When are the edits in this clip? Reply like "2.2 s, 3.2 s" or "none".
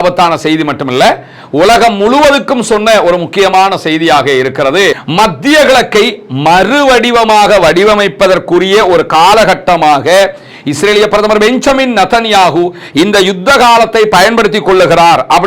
5.0 s